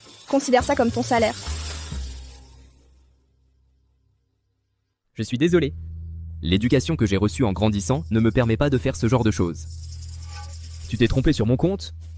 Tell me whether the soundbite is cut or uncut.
uncut